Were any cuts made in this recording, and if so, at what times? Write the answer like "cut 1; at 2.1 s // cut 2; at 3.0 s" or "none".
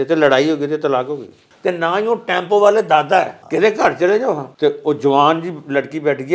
cut 1; at 1.4 s // cut 2; at 3.4 s // cut 3; at 4.5 s